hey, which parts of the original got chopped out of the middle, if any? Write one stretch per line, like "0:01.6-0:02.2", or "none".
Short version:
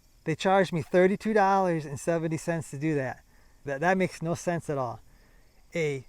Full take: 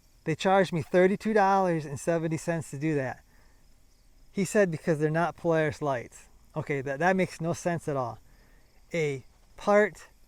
0:03.6-0:06.8